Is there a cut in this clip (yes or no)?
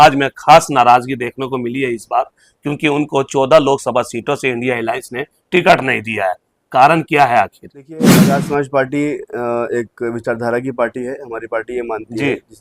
yes